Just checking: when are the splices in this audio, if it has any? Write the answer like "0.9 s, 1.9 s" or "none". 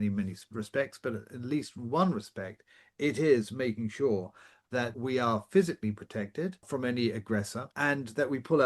4.9 s, 6.6 s, 7.7 s

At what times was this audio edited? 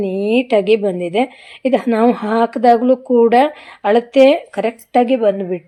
none

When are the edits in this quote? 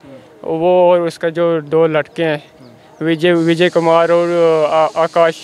none

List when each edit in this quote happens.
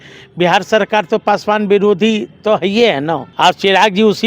3.3 s

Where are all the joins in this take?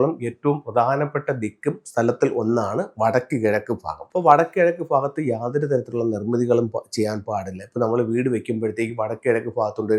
4.0 s

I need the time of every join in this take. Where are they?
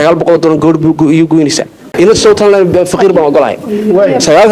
1.9 s

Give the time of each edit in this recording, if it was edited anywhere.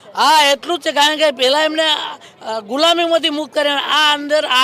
none

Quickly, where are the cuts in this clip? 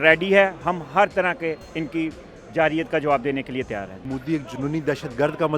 4.1 s

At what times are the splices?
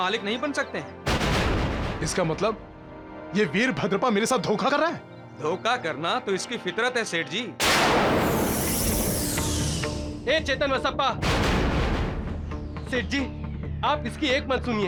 none

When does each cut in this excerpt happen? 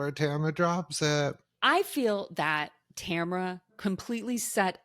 1.5 s, 3.7 s

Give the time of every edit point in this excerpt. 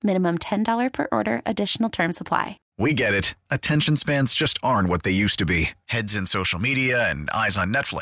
2.6 s

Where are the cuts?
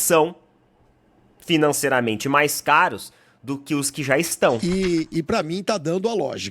4.6 s

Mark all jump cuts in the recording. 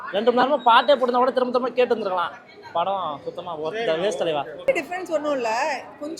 4.7 s

